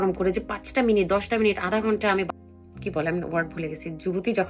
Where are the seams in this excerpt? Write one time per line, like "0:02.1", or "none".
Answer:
0:02.4

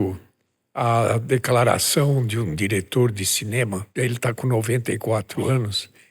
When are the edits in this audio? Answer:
0:03.8

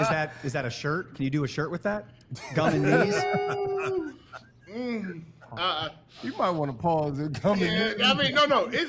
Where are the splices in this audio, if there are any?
none

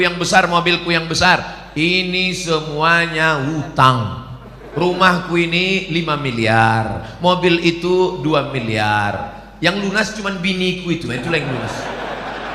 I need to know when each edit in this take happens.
none

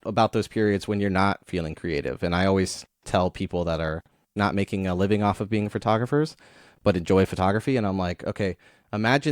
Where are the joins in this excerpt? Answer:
0:04.3

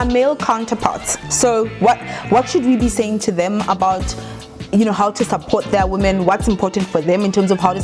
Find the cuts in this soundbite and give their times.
none

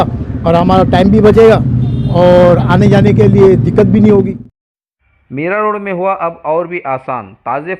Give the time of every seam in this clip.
0:04.4

